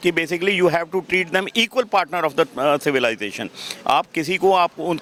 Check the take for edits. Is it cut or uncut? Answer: uncut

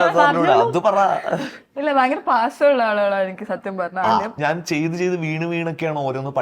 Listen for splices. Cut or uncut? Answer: cut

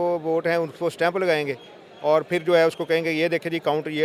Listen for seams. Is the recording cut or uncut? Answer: uncut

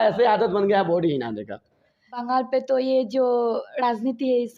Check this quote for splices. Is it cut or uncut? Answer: cut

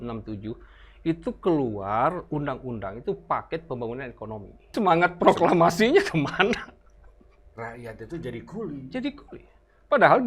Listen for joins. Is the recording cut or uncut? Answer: cut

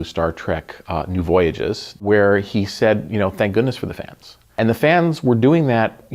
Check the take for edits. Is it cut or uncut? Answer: cut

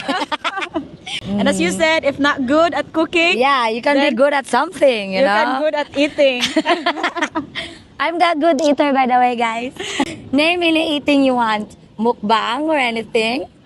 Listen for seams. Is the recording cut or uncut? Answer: cut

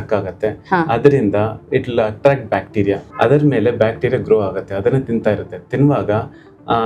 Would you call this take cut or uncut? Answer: cut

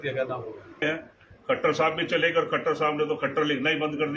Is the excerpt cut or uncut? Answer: cut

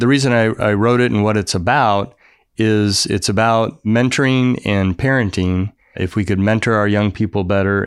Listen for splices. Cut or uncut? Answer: cut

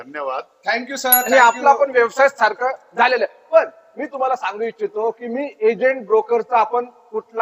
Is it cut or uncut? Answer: cut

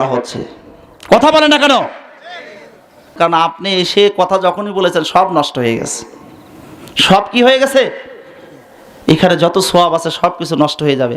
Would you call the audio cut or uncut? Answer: cut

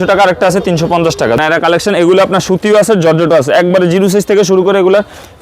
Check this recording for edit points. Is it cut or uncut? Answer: cut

